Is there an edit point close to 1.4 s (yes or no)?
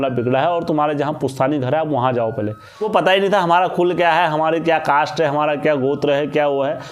no